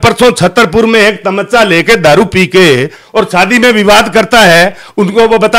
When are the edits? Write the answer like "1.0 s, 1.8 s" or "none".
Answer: none